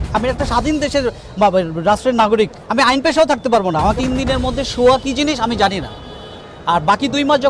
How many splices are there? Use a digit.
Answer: 1